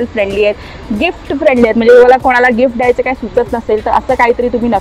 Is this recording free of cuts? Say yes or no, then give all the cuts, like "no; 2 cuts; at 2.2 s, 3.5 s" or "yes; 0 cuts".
yes; 0 cuts